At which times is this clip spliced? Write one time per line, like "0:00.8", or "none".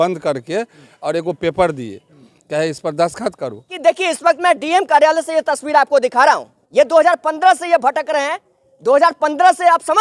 0:03.7
0:06.6